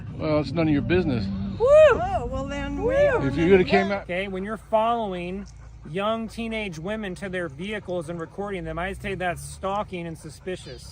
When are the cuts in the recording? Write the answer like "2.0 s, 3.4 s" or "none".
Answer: 3.9 s